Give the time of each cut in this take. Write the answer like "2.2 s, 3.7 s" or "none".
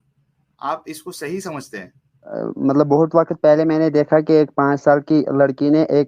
2.3 s